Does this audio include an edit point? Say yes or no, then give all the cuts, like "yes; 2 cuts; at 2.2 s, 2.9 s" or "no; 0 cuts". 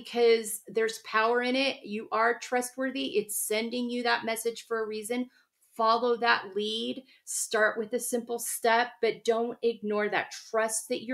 no; 0 cuts